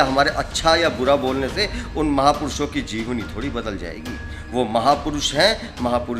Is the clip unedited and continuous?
yes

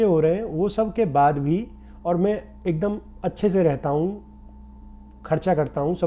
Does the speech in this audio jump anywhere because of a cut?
no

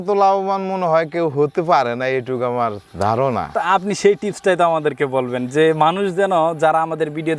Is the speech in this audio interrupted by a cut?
no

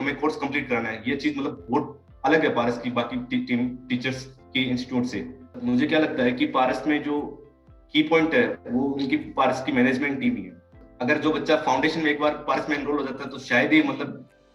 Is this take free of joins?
no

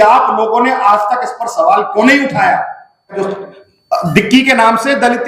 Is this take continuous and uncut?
no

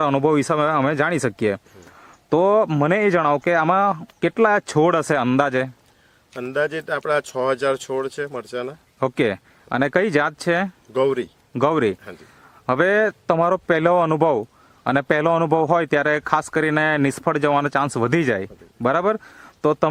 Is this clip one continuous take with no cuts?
yes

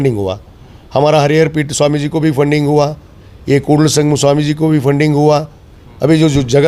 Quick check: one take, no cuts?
yes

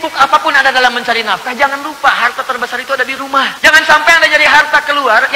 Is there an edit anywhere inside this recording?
yes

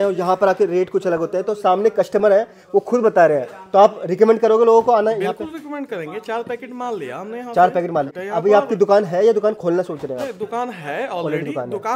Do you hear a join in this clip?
no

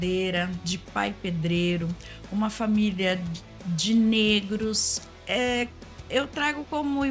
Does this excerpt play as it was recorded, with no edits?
no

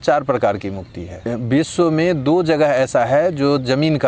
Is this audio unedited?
no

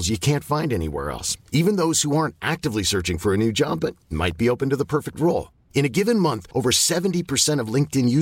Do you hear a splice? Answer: no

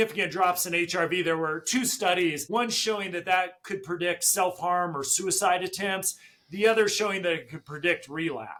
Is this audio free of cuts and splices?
yes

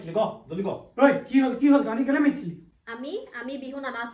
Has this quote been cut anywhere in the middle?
yes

